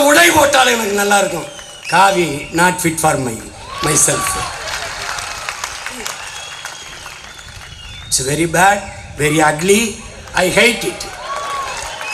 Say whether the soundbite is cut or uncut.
uncut